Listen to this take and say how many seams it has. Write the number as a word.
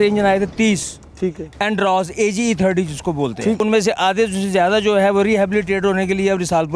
one